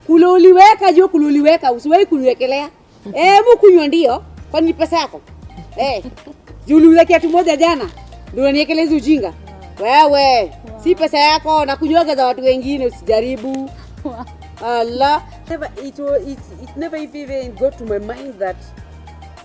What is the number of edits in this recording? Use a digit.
1